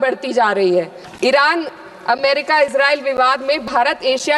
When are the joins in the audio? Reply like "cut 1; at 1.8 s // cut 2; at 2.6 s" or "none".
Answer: cut 1; at 1.0 s